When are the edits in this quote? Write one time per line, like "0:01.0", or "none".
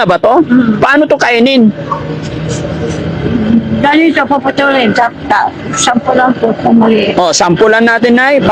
none